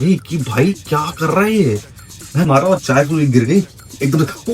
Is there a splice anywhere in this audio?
yes; 1 cut; at 2.5 s

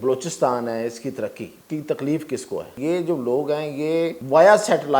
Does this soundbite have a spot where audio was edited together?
yes; 3 cuts; at 1.5 s, 2.7 s, 4.2 s

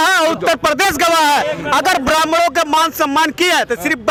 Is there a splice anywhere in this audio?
no; 0 cuts

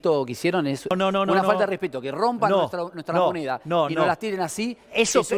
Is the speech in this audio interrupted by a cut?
yes; 1 cut; at 0.9 s

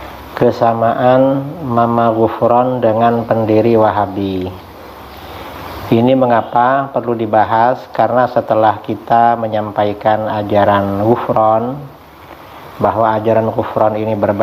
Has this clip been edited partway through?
no; 0 cuts

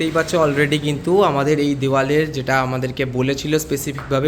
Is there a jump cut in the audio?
no; 0 cuts

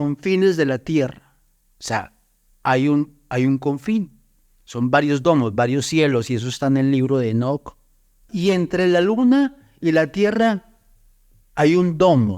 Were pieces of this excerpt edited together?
yes; 1 cut; at 8.3 s

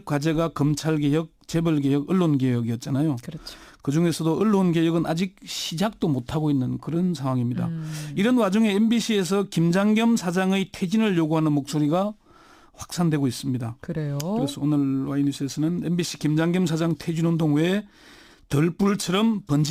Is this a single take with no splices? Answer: yes; 0 cuts

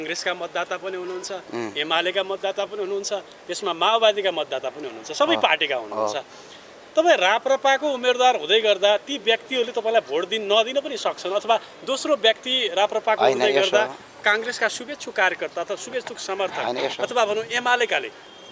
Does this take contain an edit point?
no; 0 cuts

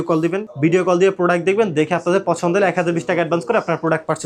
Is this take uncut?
yes; 0 cuts

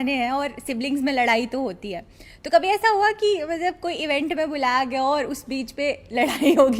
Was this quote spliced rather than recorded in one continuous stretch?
no; 0 cuts

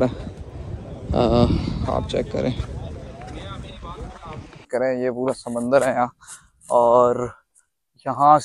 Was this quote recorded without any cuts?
no; 1 cut; at 4.7 s

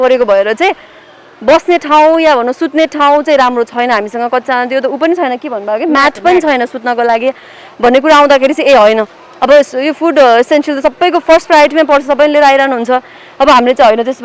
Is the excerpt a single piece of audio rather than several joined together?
yes; 0 cuts

